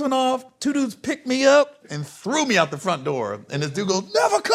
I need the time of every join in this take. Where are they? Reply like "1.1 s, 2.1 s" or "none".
1.8 s